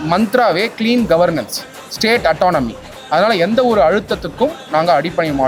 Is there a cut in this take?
no; 0 cuts

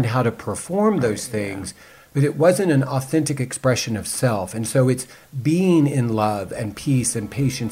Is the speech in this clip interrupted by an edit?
no; 0 cuts

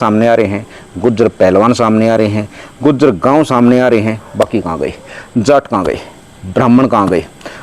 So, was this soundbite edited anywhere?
no; 0 cuts

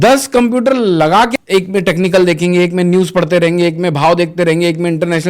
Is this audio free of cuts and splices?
no; 1 cut; at 1.3 s

